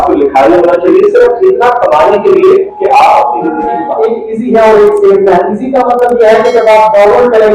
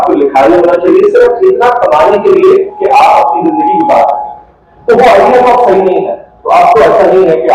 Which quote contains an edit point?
first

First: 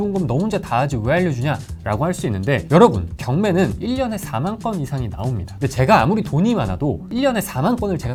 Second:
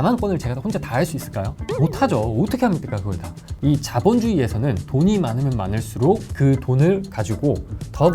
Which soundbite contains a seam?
second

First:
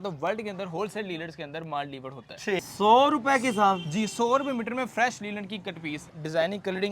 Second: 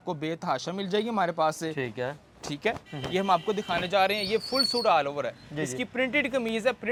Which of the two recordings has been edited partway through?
first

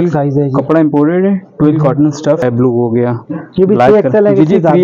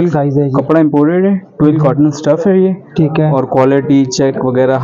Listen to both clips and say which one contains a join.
first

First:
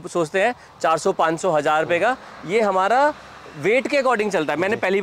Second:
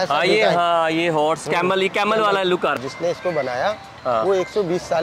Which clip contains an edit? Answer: second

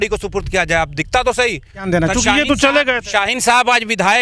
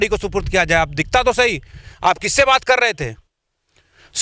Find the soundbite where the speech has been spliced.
first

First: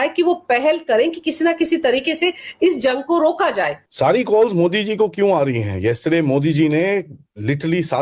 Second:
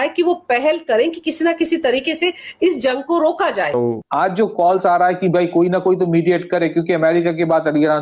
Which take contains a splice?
second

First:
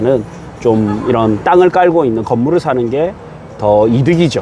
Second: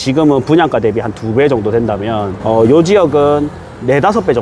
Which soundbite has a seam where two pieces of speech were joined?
second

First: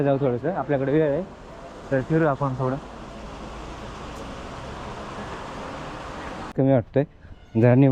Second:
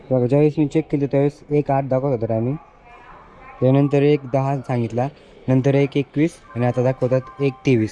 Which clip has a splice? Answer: first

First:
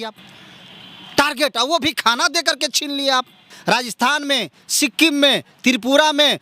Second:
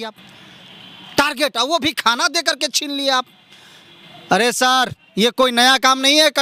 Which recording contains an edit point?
first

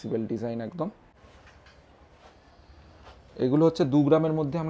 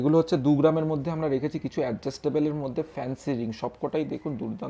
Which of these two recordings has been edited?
first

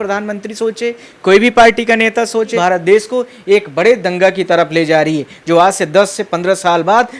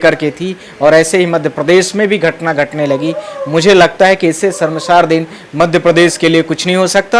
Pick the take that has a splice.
first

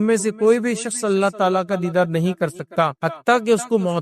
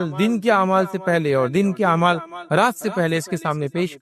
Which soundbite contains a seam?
first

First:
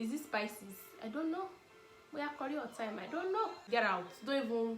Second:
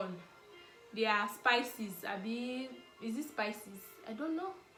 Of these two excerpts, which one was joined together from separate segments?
first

